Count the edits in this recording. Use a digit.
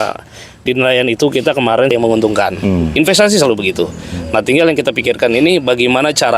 1